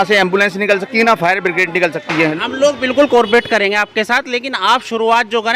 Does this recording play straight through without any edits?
no; 1 cut; at 2.3 s

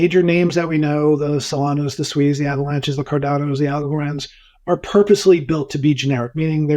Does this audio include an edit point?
no; 0 cuts

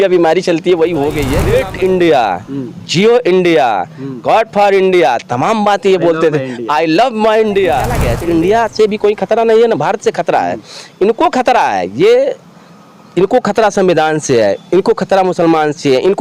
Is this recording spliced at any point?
yes; 2 cuts; at 1.3 s, 8.0 s

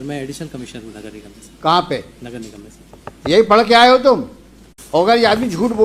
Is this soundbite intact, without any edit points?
no; 1 cut; at 4.6 s

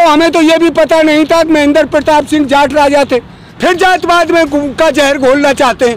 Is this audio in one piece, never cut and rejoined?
no; 1 cut; at 3.5 s

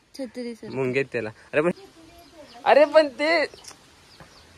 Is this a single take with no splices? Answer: no; 1 cut; at 1.7 s

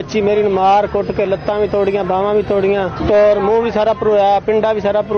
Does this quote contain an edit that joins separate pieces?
no; 0 cuts

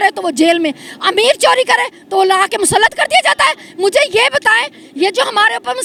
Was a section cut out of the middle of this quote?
no; 0 cuts

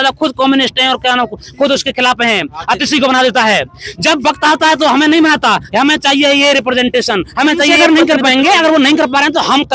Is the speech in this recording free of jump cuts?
no; 1 cut; at 7.7 s

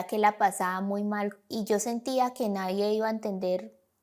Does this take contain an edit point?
yes; 1 cut; at 1.3 s

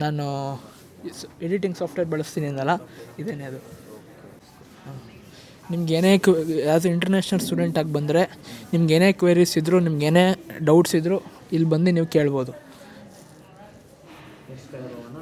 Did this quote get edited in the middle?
no; 0 cuts

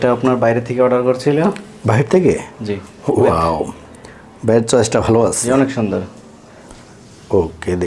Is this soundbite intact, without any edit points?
yes; 0 cuts

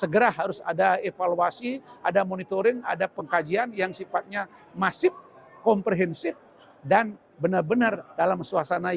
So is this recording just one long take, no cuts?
yes; 0 cuts

